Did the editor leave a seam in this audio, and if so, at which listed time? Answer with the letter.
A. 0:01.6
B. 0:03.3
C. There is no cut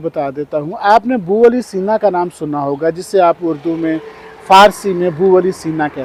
C